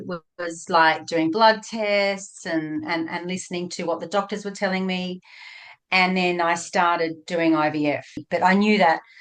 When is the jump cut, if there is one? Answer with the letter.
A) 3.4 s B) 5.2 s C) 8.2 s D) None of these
C